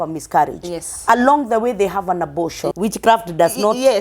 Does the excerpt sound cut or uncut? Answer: cut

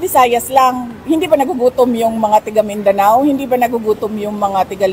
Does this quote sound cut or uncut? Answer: uncut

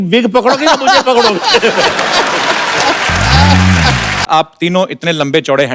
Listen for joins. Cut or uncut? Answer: cut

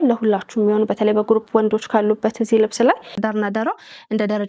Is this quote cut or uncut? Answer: cut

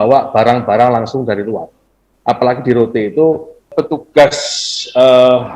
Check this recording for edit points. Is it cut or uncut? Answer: cut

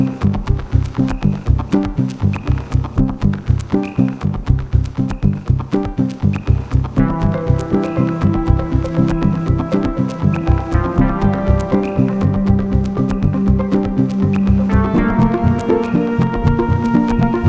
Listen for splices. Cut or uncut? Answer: uncut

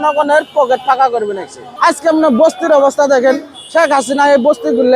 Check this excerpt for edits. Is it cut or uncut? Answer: cut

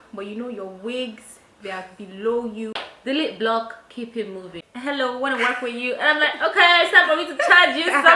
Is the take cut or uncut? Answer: cut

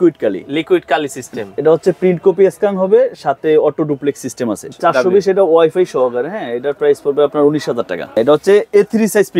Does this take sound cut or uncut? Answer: cut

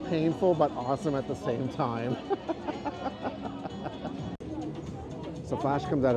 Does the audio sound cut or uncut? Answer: uncut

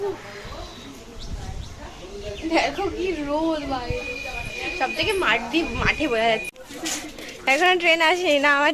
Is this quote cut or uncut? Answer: cut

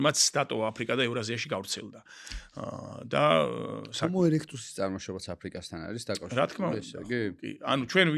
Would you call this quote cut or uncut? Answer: uncut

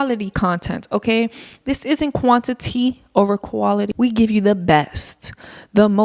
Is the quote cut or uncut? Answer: cut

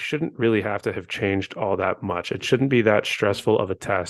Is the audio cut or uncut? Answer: uncut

